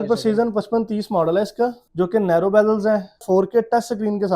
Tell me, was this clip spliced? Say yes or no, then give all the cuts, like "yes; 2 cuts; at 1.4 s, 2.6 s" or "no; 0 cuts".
yes; 2 cuts; at 1.8 s, 3.2 s